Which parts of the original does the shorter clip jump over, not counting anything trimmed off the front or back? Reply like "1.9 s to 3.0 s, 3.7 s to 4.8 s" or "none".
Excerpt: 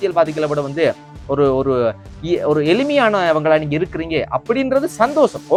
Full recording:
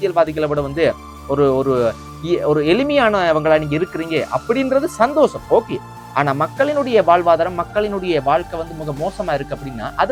none